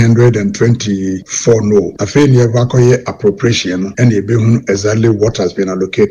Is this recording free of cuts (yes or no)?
no